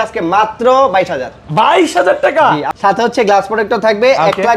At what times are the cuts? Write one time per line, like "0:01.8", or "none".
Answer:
0:02.7